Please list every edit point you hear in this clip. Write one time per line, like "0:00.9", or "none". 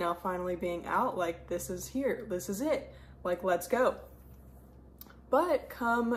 none